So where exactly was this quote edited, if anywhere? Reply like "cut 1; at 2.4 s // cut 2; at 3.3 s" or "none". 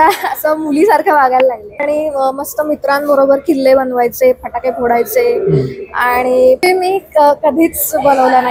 cut 1; at 1.8 s // cut 2; at 6.6 s